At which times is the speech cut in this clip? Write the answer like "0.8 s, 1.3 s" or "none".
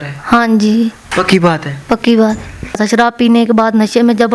3.0 s